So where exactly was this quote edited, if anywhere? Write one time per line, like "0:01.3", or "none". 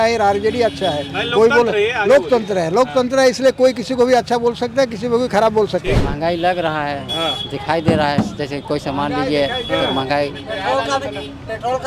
0:06.1